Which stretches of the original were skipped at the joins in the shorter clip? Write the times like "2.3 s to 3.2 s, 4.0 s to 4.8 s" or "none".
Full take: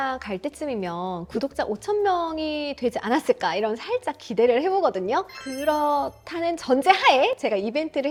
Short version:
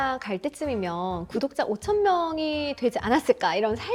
none